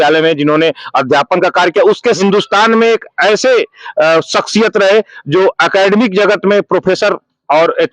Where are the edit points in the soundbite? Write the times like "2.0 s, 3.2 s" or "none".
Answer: 2.2 s